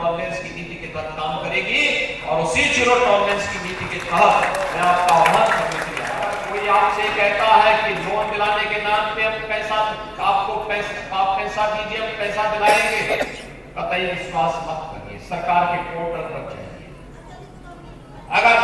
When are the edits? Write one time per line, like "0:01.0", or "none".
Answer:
0:06.2